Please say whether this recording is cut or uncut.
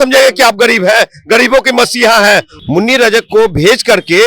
cut